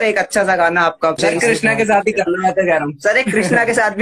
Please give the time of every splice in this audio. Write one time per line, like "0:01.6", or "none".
0:01.2